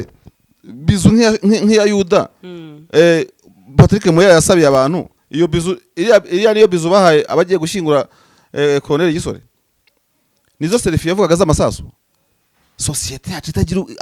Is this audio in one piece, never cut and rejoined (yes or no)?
yes